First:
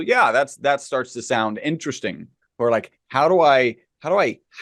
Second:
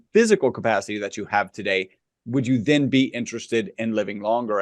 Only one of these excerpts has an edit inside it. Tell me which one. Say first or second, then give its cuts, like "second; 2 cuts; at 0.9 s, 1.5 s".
first; 1 cut; at 2.4 s